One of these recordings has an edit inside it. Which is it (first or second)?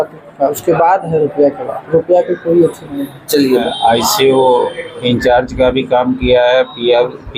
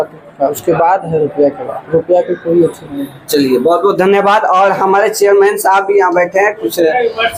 first